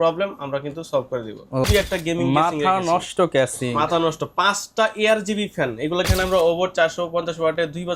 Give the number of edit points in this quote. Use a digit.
2